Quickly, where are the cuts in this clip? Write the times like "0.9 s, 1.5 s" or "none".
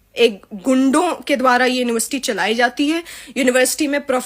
none